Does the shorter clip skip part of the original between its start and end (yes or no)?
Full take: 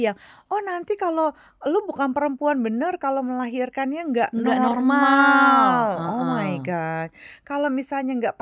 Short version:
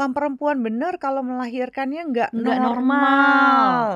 no